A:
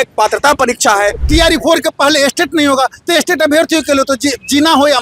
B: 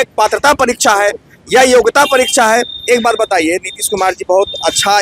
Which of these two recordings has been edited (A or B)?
A